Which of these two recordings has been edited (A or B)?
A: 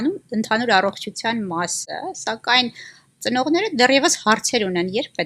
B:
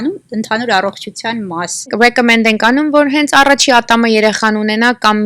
B